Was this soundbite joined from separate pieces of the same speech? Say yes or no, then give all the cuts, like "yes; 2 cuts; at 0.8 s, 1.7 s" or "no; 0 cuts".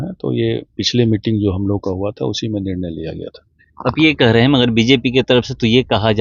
no; 0 cuts